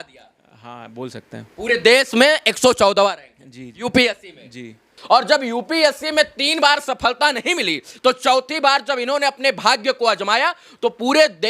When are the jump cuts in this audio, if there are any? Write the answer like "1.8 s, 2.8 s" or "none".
4.9 s